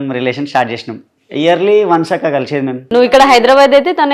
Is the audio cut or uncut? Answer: cut